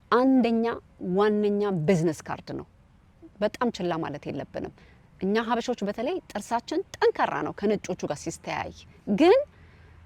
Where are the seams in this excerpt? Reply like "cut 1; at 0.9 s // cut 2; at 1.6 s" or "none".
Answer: none